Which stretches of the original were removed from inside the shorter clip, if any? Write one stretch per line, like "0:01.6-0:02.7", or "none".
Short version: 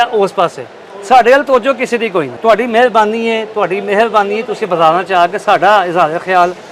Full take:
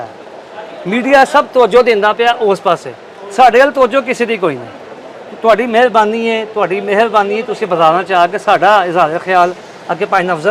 0:04.6-0:05.3